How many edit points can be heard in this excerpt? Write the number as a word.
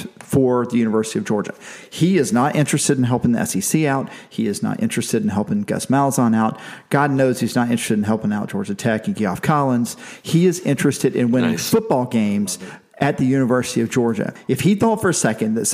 one